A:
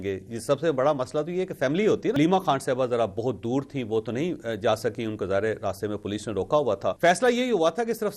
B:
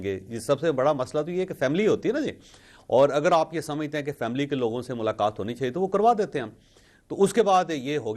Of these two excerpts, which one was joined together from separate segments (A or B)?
A